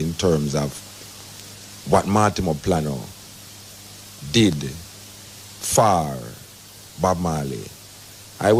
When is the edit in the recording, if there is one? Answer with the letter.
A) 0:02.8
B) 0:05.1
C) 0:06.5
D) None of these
D